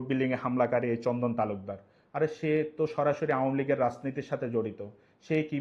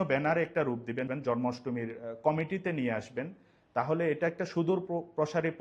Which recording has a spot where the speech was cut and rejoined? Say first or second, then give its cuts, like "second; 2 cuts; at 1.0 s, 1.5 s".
second; 1 cut; at 1.1 s